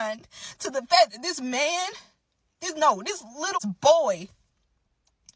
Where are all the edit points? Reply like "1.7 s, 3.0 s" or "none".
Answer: 3.6 s